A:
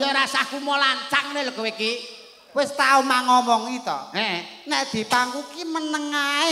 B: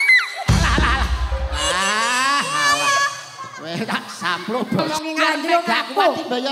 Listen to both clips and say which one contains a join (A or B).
B